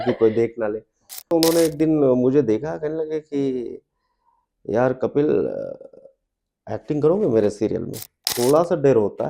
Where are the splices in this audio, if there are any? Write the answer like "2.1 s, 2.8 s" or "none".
1.2 s, 8.3 s